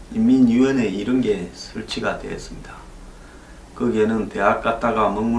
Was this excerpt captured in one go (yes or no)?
yes